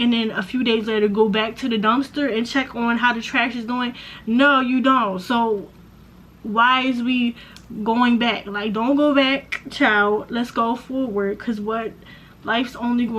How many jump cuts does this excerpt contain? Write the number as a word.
zero